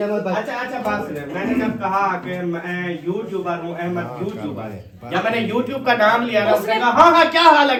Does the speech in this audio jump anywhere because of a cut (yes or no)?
no